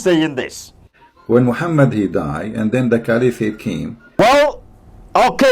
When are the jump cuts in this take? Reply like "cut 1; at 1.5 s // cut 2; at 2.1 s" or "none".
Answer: none